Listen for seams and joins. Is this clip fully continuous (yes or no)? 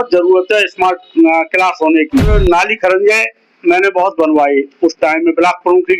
no